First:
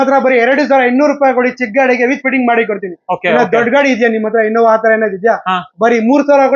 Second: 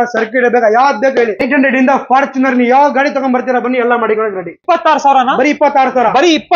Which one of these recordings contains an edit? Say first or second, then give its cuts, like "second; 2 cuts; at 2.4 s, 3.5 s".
second; 2 cuts; at 1.4 s, 4.6 s